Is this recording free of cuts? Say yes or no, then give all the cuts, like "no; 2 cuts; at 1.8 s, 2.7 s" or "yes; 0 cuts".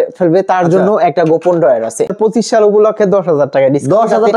no; 1 cut; at 2.1 s